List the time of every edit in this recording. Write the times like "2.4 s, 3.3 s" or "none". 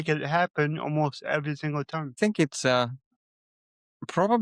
2.2 s